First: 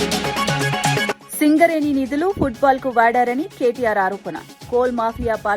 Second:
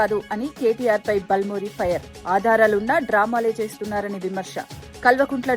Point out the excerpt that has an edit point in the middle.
first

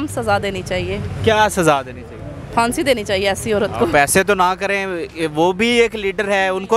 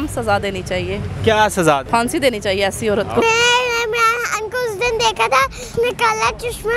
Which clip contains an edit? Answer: second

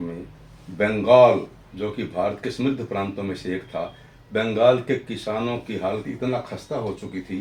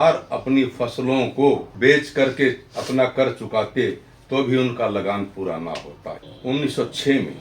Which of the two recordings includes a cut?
second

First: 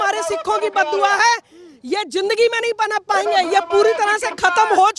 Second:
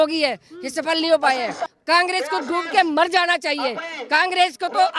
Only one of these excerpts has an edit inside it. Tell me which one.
second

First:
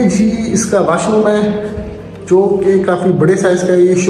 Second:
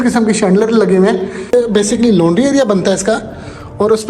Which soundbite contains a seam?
second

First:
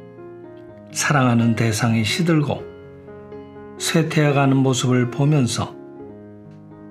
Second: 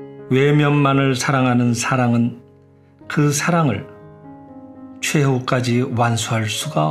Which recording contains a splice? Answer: second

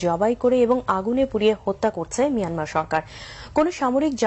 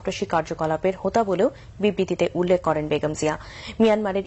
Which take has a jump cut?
first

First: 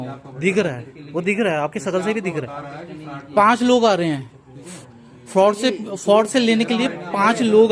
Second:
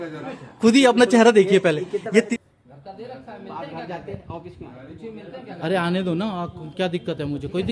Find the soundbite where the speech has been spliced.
second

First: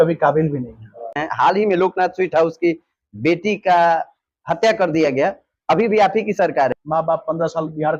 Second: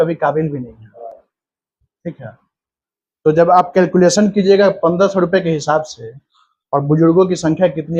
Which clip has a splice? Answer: first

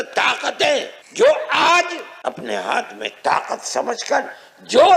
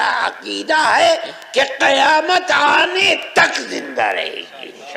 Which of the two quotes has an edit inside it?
first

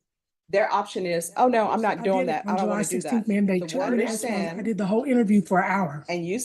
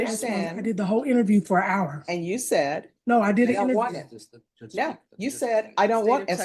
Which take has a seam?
first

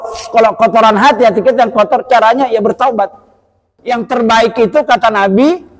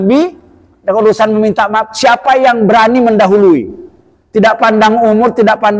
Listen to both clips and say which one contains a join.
first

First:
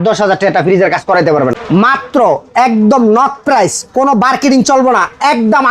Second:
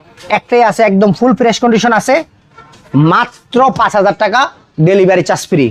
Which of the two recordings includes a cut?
first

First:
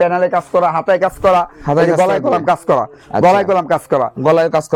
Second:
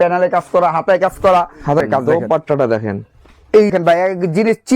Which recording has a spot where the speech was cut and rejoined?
second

